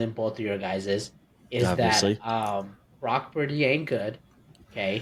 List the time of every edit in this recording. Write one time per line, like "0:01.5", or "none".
none